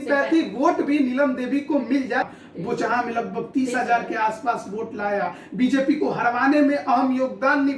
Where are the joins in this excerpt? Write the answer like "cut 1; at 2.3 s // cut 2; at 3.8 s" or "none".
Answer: cut 1; at 2.2 s